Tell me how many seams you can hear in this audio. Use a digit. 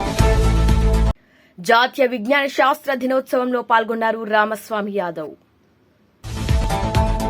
0